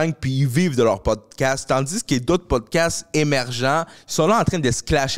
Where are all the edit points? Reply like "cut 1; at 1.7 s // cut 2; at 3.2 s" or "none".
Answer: none